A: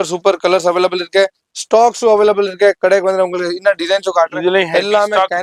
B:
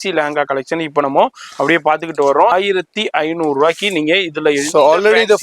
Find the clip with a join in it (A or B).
B